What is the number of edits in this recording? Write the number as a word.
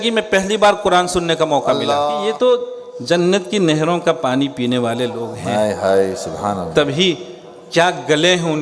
one